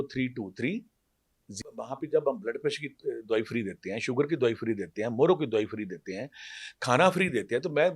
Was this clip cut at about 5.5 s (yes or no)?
no